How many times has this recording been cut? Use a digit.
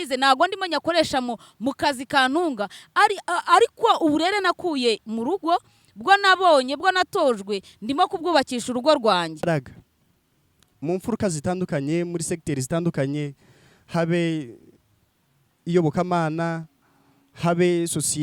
1